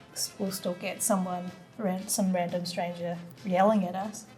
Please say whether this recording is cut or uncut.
cut